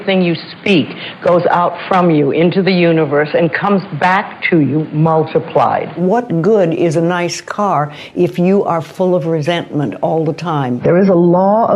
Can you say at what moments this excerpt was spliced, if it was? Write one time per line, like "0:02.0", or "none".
0:06.0
0:10.7